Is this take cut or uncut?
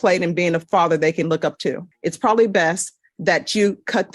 cut